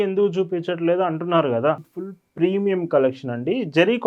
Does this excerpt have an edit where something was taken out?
yes; 1 cut; at 1.9 s

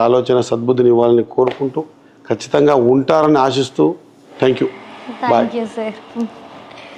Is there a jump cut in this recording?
no; 0 cuts

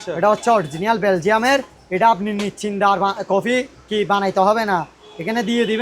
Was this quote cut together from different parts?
no; 0 cuts

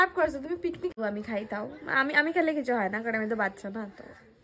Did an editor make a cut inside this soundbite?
yes; 1 cut; at 0.9 s

